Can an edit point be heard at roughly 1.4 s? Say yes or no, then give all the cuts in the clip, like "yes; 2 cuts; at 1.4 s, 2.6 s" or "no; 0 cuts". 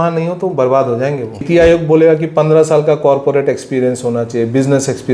yes; 1 cut; at 1.4 s